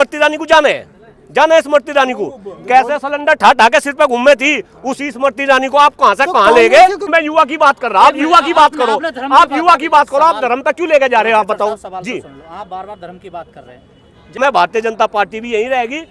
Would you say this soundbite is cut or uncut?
cut